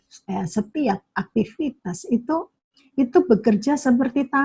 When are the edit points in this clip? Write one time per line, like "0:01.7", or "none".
none